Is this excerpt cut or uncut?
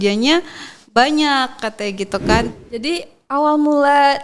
cut